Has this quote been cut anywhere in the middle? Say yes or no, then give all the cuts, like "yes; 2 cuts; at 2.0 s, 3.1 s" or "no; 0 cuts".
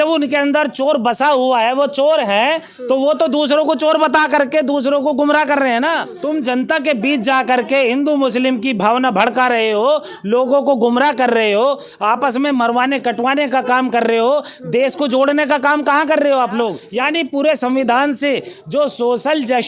yes; 2 cuts; at 6.1 s, 16.8 s